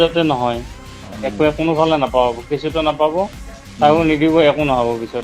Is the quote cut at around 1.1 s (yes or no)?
yes